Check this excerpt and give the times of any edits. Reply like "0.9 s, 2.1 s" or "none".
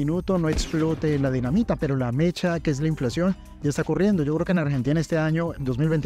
none